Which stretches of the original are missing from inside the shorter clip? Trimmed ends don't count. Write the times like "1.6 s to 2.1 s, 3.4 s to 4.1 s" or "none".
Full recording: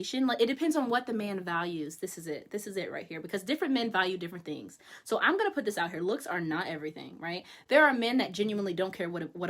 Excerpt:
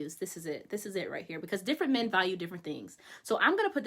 none